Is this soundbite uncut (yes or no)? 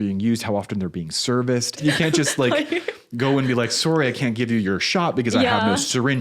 no